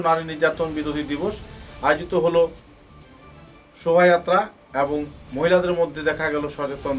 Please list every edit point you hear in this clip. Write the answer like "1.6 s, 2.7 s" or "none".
none